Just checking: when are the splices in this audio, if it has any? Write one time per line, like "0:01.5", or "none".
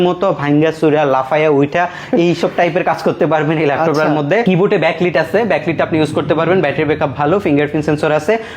none